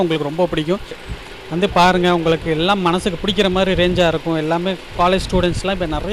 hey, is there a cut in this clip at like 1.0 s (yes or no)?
yes